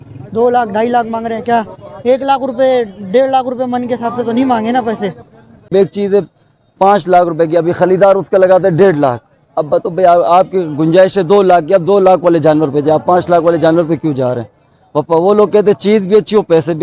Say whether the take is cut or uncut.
cut